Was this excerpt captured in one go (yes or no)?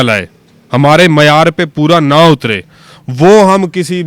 yes